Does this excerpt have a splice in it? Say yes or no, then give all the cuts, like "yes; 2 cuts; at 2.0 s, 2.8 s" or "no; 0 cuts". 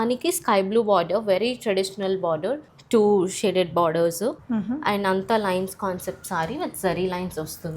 yes; 2 cuts; at 2.7 s, 4.4 s